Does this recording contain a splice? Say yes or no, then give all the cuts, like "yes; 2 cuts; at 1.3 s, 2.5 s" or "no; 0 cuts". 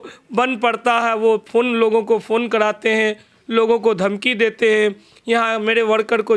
no; 0 cuts